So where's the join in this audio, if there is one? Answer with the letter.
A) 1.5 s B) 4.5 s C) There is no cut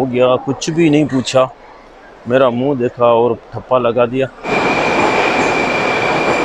B